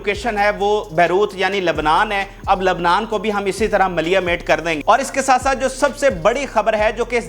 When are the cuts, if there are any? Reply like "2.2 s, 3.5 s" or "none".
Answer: 4.8 s